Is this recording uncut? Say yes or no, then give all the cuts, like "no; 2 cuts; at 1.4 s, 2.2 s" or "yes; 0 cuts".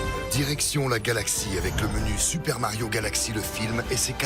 yes; 0 cuts